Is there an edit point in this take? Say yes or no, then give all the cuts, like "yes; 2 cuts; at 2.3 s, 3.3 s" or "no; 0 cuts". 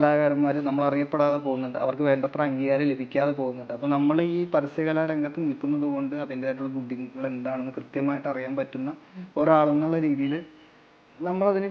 no; 0 cuts